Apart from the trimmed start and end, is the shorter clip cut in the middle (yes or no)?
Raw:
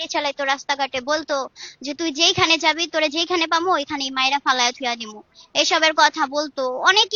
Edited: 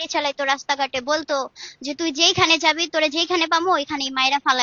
no